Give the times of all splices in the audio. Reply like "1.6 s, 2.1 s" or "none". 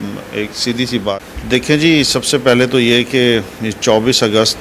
1.1 s